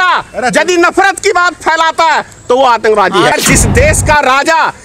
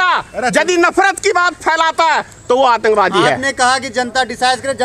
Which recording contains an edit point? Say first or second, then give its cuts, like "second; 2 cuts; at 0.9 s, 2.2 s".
first; 1 cut; at 3.3 s